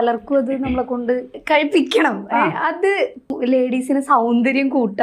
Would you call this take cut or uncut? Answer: cut